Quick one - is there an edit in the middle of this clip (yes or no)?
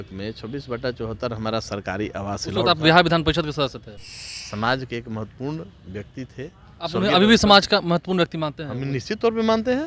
yes